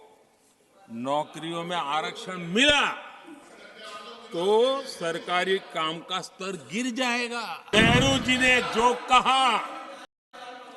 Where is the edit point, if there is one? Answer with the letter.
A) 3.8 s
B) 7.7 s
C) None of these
B